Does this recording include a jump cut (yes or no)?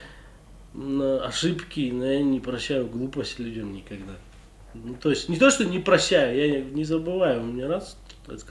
no